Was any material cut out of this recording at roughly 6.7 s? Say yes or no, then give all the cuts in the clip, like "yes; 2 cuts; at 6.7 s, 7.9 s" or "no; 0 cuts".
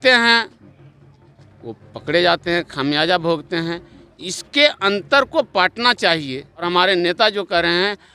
yes; 1 cut; at 6.7 s